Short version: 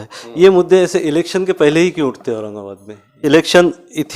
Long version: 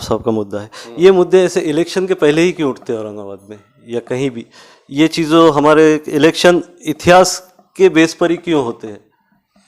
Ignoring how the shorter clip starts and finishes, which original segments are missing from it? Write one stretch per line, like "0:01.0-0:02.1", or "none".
0:03.8-0:06.1